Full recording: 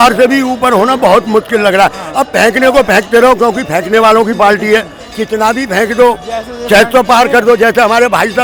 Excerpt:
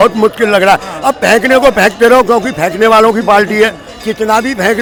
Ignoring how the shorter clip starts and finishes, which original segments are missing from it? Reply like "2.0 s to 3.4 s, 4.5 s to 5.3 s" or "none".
none